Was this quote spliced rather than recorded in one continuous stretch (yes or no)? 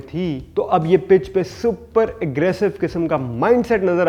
no